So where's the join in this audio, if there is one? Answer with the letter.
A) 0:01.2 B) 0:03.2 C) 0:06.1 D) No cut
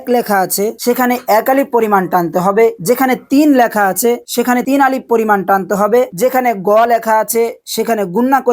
C